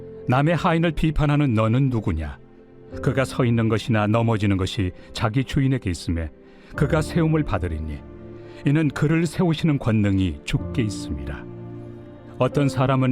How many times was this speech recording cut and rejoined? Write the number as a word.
one